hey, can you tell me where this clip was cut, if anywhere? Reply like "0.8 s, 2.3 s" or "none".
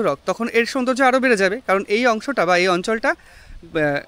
none